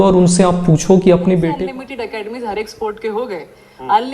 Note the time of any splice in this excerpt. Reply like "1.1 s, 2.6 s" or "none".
1.5 s